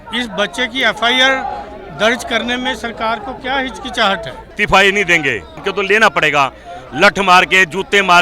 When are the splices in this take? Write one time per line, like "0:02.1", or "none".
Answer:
0:04.5
0:05.6